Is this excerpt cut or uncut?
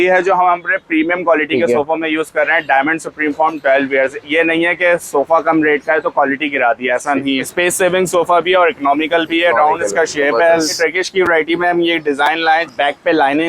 cut